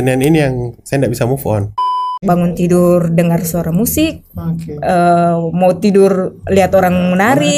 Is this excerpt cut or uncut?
cut